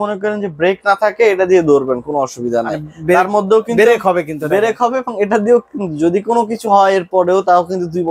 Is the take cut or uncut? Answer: uncut